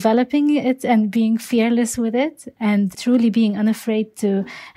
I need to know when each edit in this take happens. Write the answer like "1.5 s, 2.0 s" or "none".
2.9 s